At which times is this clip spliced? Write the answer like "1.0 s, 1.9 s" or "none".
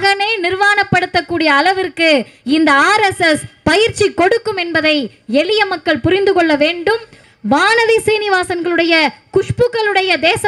7.2 s